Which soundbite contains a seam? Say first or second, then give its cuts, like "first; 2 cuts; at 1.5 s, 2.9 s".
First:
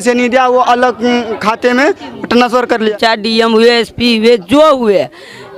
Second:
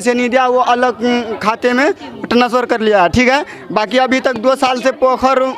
first; 1 cut; at 2.9 s